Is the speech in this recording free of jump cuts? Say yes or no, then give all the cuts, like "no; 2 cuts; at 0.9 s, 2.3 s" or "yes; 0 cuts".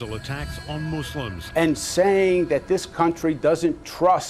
yes; 0 cuts